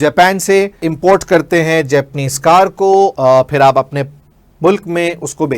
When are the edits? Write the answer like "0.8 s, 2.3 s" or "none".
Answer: 0.9 s, 3.1 s